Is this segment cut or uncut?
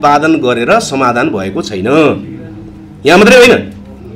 uncut